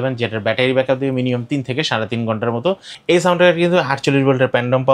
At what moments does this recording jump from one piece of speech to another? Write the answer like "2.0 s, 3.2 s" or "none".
2.9 s